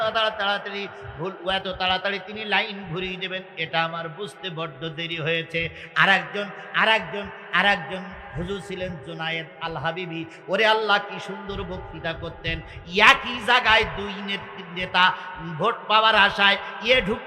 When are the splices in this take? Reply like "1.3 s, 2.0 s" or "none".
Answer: none